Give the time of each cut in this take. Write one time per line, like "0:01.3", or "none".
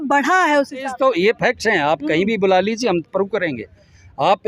0:00.9

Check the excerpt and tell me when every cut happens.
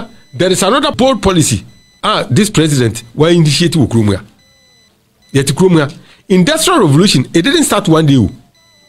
0:00.9

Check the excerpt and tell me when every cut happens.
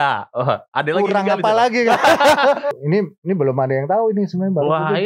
0:02.8

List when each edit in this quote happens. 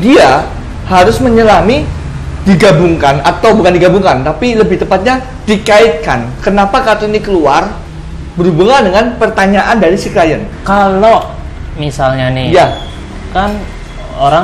0:10.5

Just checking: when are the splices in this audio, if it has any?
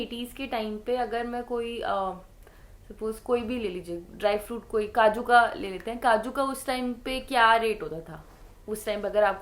none

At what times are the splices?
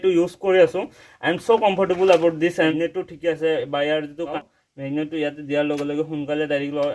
0:02.7
0:04.4

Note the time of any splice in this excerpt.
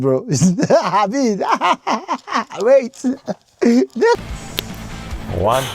0:04.2

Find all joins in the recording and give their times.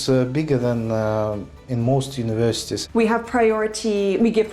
0:02.7

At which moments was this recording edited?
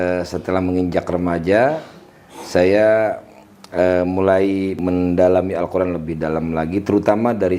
0:04.8

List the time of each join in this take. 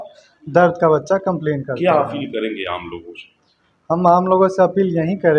none

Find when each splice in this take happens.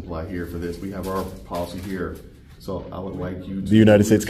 none

